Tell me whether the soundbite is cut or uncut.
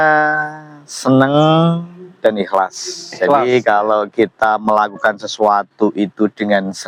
uncut